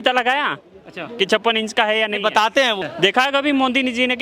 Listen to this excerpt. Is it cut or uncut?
cut